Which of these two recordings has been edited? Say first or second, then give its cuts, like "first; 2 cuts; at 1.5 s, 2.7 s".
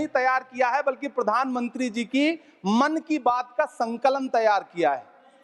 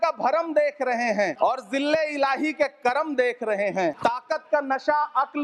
second; 2 cuts; at 1.3 s, 4.0 s